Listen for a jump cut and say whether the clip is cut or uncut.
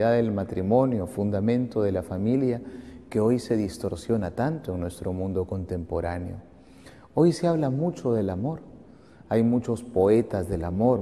cut